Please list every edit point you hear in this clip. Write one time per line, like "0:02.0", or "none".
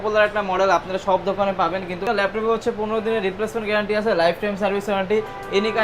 0:02.0

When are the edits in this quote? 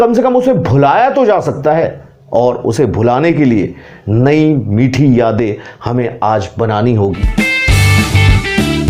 0:07.2

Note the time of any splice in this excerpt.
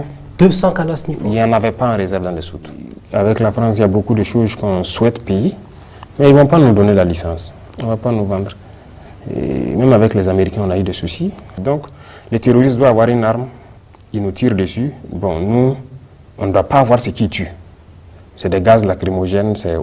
0:02.9

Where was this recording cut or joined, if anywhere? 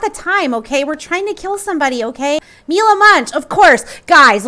0:02.4

